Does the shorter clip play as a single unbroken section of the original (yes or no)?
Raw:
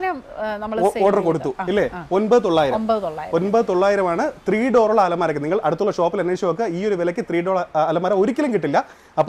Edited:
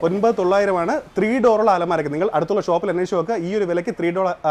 yes